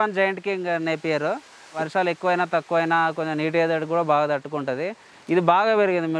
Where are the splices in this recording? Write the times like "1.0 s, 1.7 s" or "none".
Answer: 1.9 s